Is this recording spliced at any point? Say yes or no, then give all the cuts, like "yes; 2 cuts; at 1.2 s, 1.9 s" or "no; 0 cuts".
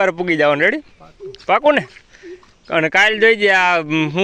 no; 0 cuts